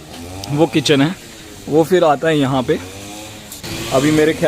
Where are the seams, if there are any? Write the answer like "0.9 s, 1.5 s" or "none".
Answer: 3.5 s